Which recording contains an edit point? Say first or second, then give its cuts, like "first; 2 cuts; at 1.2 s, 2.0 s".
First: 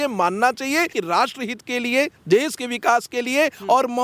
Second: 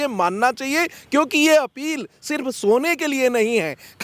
first; 1 cut; at 1.0 s